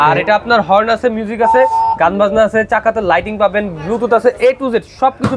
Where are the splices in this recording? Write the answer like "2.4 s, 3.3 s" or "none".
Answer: none